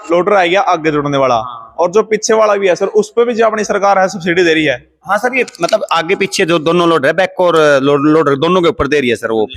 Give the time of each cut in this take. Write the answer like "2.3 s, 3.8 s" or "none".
none